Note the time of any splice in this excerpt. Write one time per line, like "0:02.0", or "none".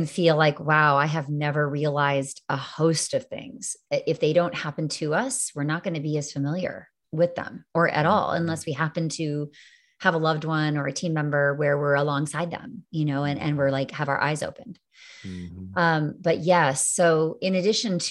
none